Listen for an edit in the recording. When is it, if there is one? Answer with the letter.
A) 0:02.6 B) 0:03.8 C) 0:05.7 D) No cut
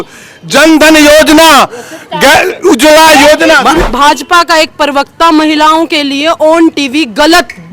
B